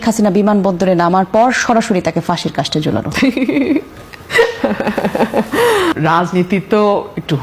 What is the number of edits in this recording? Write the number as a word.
one